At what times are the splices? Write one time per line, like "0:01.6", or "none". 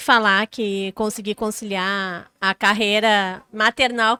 none